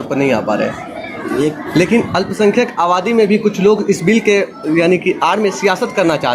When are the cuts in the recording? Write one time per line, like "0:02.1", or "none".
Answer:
0:01.6